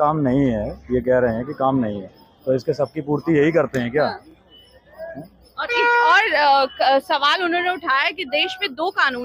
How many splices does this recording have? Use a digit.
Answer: 0